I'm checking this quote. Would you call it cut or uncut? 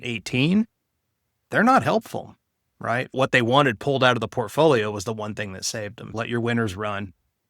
cut